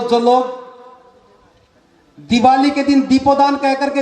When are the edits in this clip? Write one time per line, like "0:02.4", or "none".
none

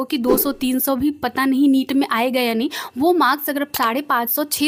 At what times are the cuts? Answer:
none

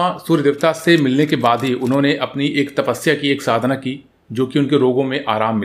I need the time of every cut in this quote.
none

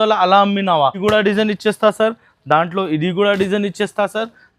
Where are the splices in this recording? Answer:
0:01.0

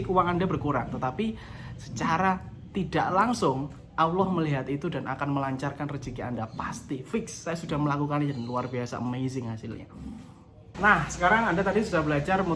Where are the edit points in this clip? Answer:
none

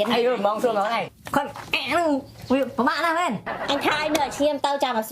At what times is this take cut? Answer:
0:01.2

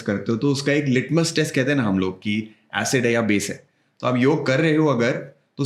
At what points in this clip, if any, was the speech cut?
none

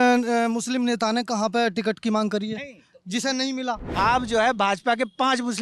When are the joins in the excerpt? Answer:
0:03.8

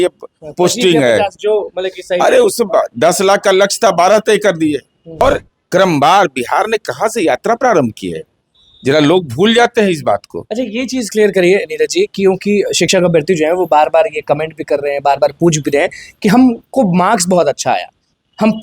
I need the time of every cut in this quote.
0:05.2

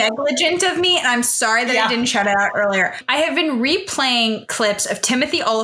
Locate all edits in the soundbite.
0:03.0

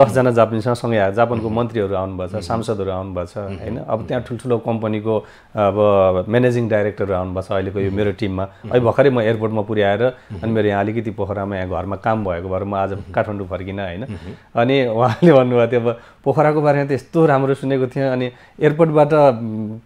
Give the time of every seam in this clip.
none

